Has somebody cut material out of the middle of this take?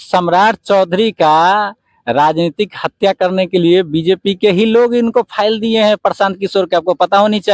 no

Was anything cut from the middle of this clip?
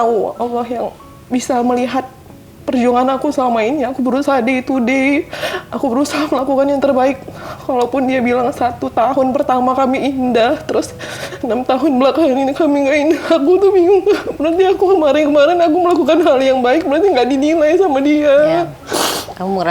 no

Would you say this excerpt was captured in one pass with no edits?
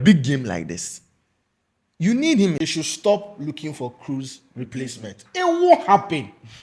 no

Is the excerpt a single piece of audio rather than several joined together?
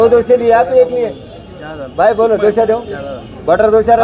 yes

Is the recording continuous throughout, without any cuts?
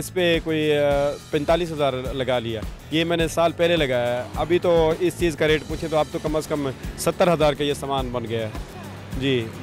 yes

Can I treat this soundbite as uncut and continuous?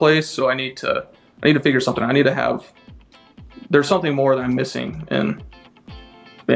yes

